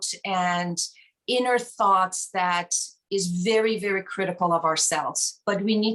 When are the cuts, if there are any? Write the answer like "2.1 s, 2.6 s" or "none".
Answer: none